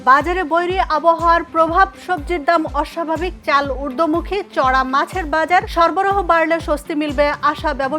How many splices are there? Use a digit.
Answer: 0